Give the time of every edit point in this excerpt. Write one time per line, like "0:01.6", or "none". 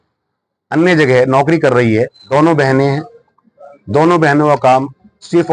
0:02.2